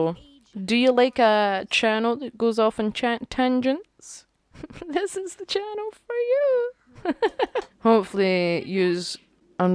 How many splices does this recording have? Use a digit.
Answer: 1